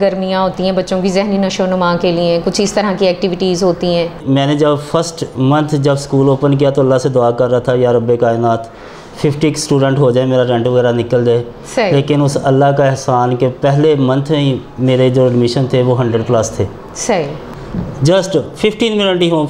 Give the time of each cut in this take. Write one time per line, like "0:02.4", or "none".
0:04.2
0:17.5